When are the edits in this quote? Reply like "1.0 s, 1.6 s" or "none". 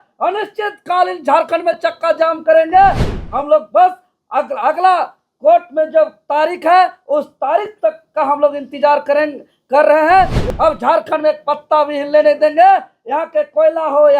3.1 s, 10.4 s